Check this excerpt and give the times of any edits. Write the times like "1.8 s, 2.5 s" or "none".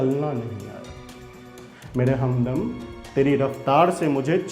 none